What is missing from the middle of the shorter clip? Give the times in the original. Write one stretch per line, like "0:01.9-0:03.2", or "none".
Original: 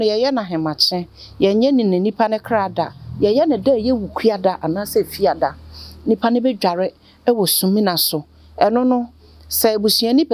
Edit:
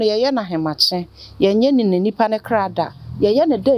none